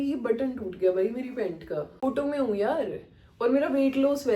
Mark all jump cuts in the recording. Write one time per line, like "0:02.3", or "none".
0:02.0